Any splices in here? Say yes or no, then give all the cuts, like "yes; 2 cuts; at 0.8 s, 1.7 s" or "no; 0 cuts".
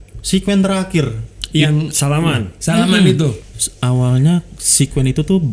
yes; 1 cut; at 3.4 s